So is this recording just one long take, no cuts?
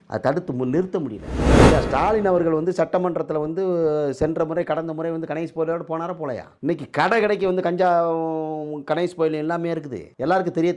no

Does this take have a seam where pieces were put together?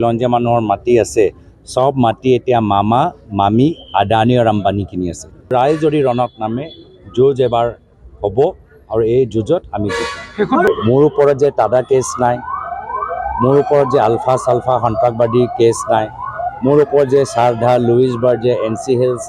yes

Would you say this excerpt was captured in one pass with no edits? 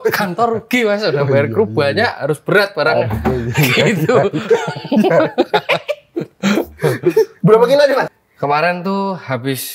no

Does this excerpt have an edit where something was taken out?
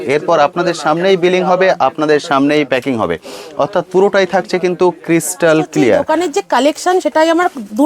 yes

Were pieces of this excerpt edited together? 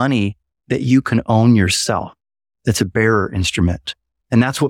no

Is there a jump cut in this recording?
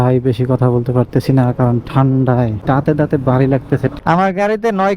yes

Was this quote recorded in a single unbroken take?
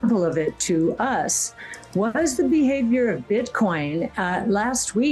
yes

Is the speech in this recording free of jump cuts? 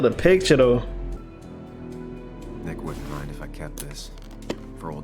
yes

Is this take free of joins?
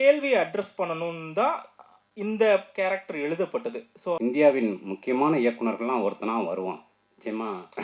no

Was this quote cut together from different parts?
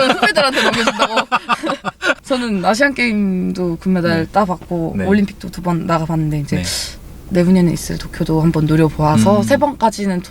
no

